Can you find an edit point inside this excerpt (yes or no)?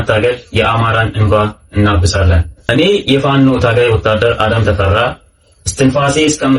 yes